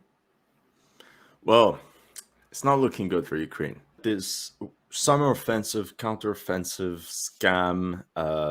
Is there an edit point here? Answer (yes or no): yes